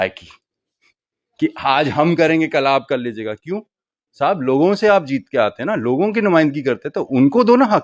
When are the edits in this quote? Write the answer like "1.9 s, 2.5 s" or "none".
none

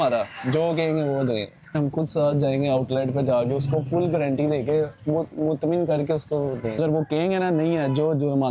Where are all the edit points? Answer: 1.7 s, 6.8 s

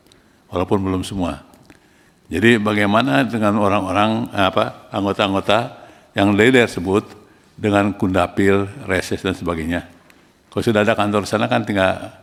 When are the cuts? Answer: none

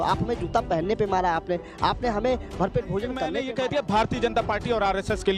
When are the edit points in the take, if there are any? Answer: 3.4 s

